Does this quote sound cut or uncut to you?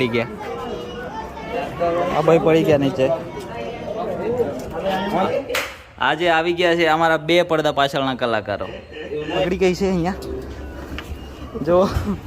cut